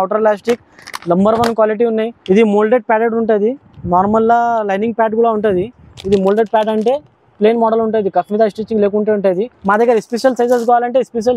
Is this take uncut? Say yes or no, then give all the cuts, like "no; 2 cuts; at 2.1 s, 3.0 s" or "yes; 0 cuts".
no; 2 cuts; at 2.2 s, 9.5 s